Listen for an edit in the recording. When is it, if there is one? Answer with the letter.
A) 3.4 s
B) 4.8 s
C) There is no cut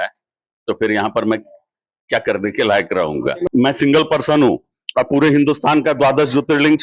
A